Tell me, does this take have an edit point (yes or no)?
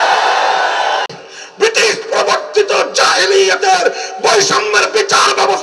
yes